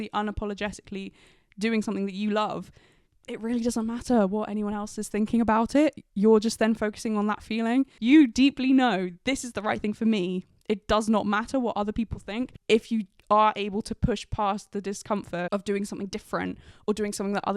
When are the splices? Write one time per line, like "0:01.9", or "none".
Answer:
0:08.0
0:12.5